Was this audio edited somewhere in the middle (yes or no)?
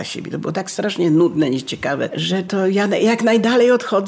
yes